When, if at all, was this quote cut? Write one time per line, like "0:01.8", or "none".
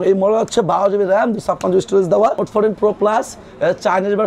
0:02.4